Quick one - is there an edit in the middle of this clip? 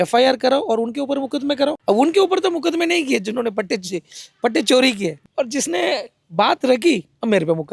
yes; 2 cuts; at 1.8 s, 5.2 s

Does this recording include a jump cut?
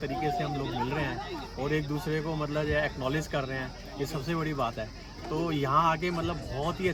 no; 0 cuts

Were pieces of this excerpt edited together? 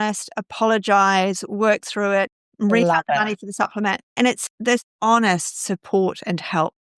yes; 1 cut; at 4.9 s

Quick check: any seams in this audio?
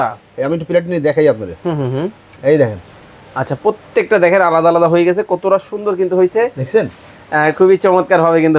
no; 0 cuts

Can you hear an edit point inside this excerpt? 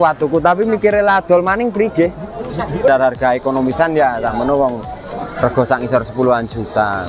yes; 1 cut; at 2.9 s

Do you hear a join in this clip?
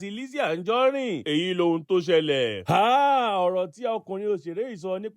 yes; 1 cut; at 2.6 s

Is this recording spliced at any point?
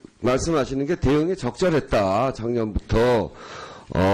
yes; 1 cut; at 1.0 s

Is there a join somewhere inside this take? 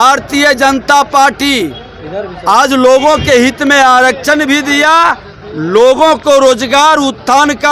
no; 0 cuts

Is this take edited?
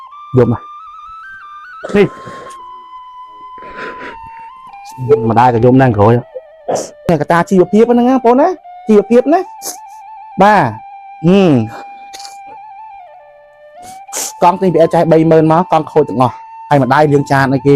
yes; 1 cut; at 7.1 s

